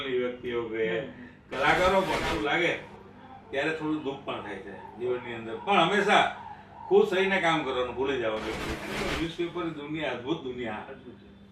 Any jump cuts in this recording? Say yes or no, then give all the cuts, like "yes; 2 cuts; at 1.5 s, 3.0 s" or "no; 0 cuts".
yes; 2 cuts; at 2.3 s, 9.0 s